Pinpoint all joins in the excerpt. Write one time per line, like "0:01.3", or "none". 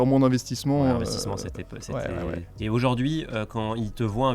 none

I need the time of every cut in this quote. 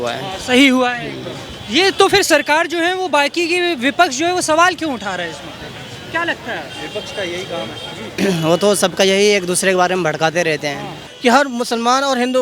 0:11.0

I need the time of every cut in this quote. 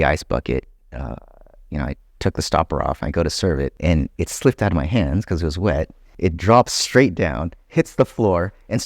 0:03.7
0:06.0

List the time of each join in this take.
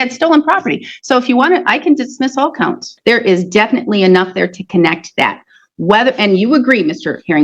0:02.9

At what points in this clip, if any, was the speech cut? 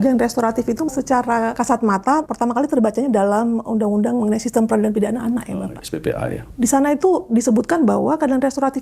0:01.0
0:02.3
0:06.4

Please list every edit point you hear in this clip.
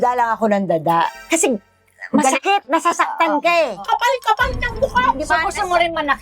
0:01.1
0:03.8

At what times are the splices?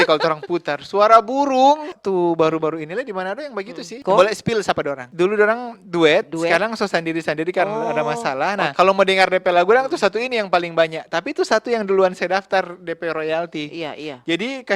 0:02.0
0:03.9
0:05.0
0:08.7

